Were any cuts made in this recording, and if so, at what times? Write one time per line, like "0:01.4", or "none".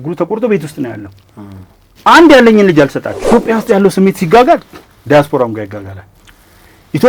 0:03.1